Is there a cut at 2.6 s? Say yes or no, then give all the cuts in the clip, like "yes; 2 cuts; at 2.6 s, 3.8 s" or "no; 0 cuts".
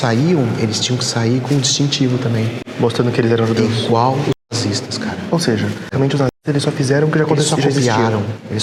no; 0 cuts